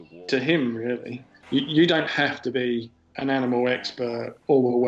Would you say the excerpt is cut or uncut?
cut